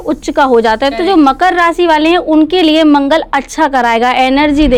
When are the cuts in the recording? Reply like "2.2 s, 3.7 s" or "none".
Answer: none